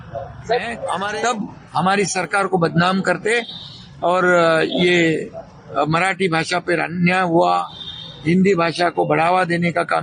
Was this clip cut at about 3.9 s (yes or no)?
no